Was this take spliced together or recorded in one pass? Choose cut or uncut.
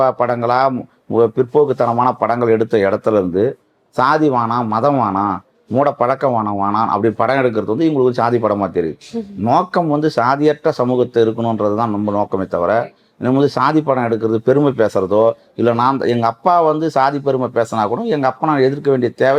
uncut